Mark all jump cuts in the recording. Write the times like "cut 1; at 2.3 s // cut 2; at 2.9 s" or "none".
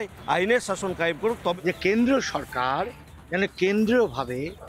cut 1; at 1.6 s